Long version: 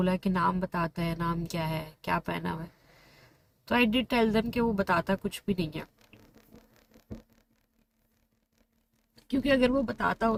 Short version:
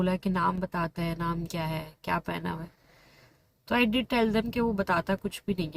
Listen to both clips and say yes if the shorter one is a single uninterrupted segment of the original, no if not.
yes